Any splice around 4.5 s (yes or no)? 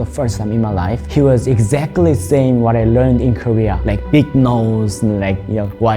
no